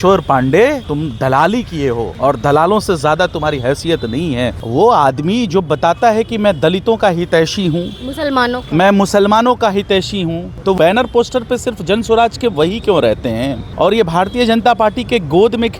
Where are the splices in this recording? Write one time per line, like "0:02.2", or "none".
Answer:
0:00.9
0:02.1
0:04.6
0:10.7
0:13.6

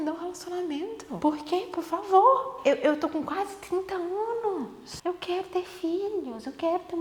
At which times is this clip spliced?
0:01.1
0:02.5
0:04.8

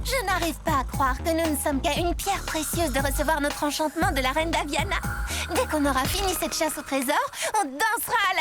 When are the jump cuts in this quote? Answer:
none

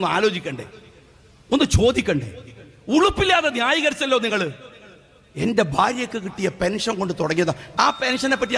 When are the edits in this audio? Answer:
0:07.7

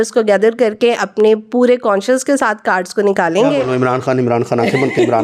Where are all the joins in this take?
none

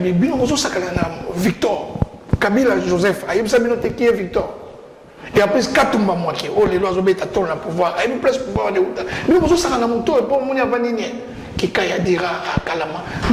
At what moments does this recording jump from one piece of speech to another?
none

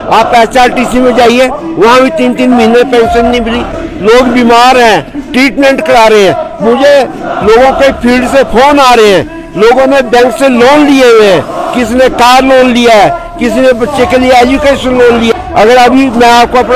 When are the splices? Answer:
0:03.8
0:15.3

